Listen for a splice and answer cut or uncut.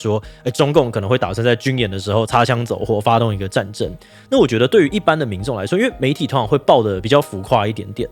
uncut